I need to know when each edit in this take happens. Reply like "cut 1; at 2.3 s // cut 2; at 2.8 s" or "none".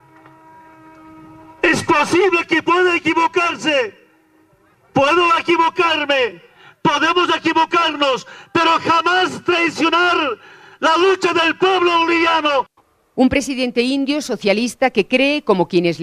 cut 1; at 13.8 s